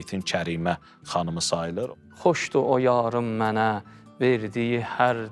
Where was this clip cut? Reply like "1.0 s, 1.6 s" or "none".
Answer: 1.9 s